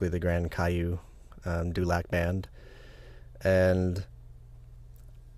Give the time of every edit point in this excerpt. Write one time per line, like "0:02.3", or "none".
0:03.3